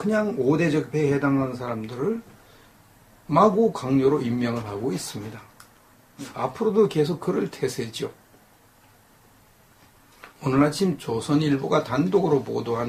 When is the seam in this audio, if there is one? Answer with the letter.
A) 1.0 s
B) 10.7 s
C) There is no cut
C